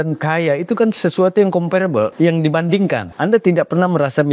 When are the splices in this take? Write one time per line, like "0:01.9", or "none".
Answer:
0:02.1
0:03.1